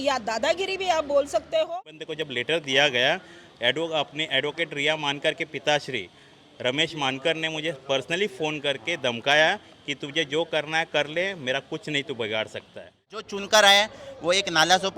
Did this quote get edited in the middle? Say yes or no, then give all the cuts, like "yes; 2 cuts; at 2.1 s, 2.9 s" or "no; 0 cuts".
yes; 2 cuts; at 1.7 s, 13.1 s